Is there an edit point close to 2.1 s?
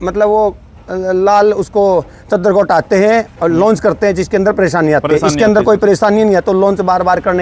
no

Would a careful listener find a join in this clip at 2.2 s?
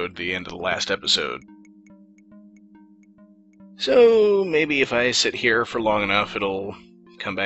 no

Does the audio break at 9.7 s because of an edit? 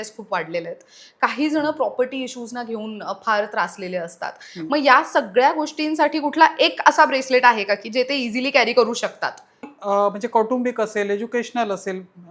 yes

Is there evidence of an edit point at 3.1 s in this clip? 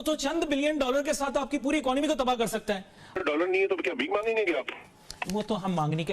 yes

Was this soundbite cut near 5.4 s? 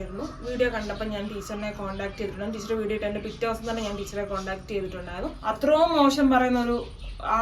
yes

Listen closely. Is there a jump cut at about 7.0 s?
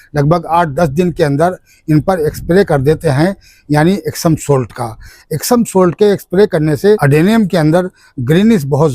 yes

